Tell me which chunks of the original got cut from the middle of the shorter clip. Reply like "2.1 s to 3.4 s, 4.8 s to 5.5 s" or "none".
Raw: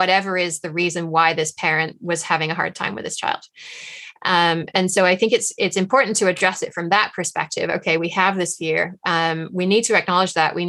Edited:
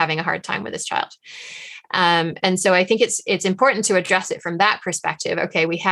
none

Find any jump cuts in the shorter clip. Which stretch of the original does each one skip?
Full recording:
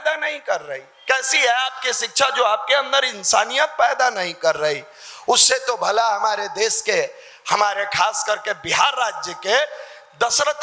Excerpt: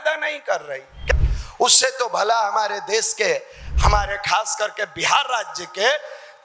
1.2 s to 4.9 s

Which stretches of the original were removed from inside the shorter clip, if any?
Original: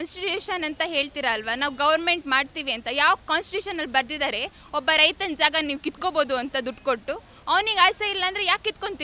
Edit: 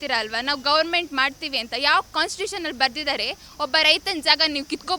none

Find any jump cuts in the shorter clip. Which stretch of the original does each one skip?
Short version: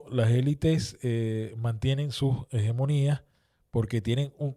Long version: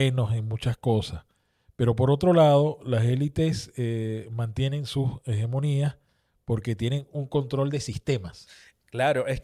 none

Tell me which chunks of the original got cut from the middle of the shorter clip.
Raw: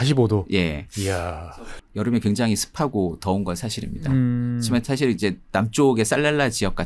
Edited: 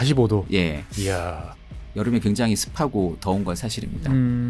none

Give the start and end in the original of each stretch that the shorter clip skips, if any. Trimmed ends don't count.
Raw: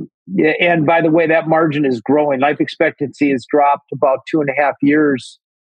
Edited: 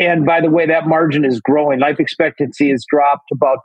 none

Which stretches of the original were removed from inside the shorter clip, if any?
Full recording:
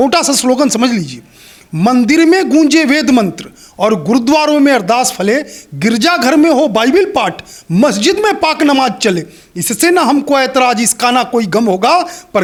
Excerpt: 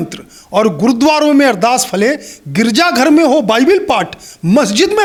none

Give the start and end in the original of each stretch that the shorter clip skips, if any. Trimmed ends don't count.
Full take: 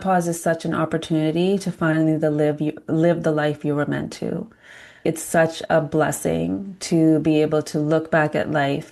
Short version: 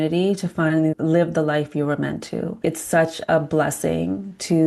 2.2 s to 2.8 s, 4.4 s to 4.9 s

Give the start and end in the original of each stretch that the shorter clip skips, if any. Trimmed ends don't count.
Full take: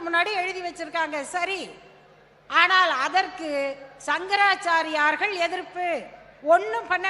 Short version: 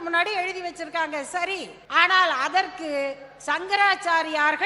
1.8 s to 2.4 s

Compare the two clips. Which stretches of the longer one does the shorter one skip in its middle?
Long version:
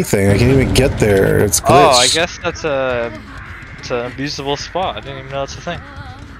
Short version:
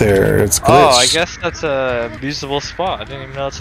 3.2 s to 4.1 s

